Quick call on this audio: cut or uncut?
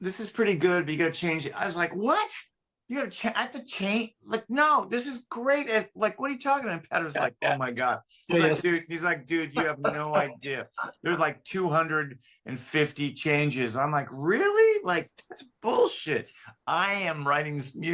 uncut